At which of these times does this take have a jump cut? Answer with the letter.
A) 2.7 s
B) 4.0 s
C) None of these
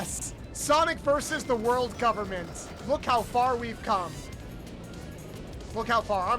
A